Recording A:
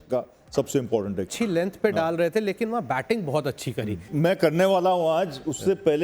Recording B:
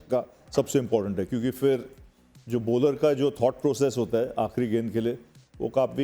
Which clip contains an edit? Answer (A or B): A